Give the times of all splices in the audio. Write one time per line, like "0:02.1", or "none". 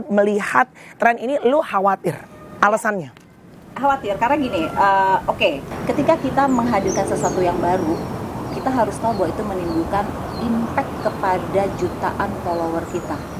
0:05.7